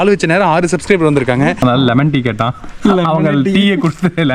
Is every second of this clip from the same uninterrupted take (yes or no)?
no